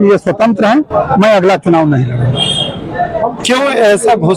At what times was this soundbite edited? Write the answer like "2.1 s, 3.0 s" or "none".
none